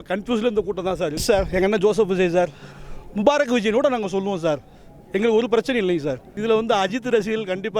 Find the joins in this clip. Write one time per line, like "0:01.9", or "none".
0:01.2
0:06.4